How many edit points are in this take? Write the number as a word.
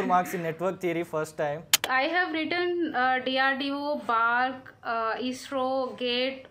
one